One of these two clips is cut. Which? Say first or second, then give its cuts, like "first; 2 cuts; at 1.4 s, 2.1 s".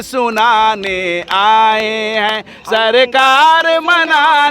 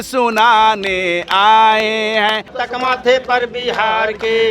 second; 1 cut; at 2.5 s